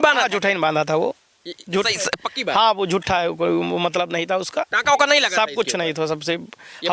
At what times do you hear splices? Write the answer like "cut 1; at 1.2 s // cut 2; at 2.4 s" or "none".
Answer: none